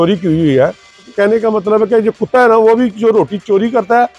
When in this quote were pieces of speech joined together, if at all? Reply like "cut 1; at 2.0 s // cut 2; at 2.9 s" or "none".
cut 1; at 1.1 s